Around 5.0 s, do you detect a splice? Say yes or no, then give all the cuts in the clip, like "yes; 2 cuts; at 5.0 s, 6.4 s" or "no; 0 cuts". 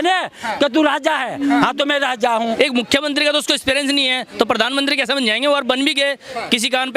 no; 1 cut; at 2.5 s